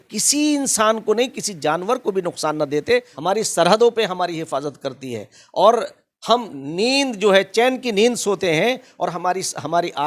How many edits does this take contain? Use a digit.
1